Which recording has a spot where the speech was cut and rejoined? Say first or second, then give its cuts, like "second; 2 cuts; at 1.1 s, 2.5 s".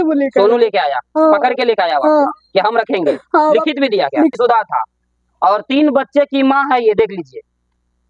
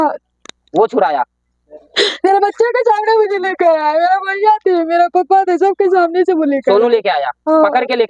first; 1 cut; at 4.3 s